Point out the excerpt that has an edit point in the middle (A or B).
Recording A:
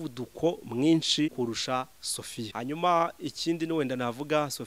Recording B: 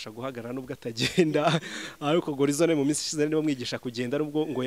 A